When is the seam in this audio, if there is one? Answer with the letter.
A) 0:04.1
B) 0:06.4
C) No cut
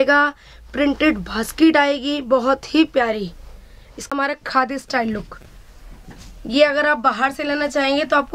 A